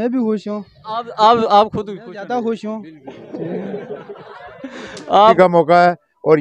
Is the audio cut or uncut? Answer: cut